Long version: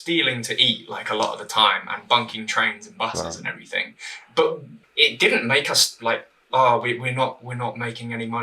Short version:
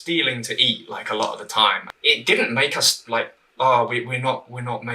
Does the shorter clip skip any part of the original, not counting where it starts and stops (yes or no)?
yes